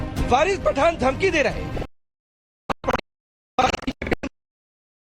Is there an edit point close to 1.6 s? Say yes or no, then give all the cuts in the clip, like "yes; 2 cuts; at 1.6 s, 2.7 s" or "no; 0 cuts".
no; 1 cut; at 2.8 s